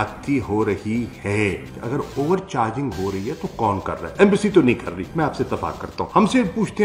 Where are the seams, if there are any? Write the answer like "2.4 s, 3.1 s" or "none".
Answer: 1.7 s, 6.0 s